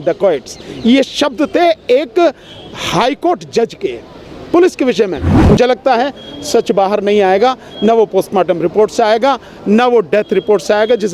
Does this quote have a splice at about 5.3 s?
yes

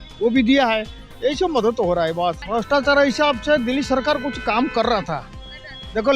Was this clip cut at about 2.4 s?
yes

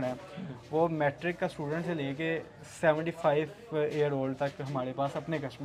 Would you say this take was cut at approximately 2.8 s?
no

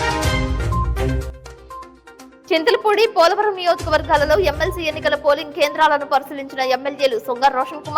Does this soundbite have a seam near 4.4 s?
no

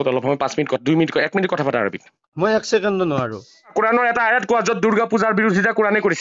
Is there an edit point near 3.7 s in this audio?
yes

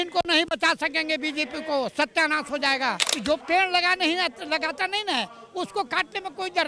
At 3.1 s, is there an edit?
yes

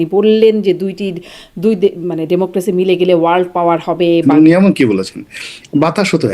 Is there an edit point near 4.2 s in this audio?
yes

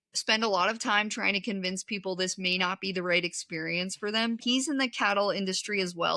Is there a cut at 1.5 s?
no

